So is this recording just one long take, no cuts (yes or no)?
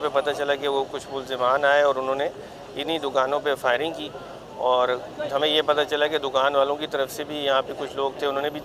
yes